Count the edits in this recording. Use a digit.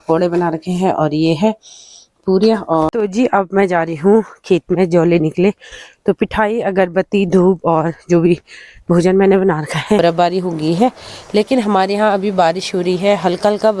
2